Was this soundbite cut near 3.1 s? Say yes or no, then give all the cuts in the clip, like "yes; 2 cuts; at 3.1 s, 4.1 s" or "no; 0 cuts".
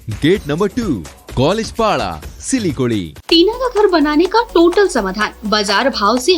yes; 1 cut; at 3.1 s